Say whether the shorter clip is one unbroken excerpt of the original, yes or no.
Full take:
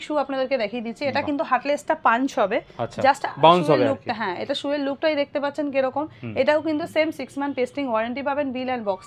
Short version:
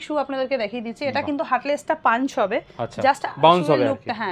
yes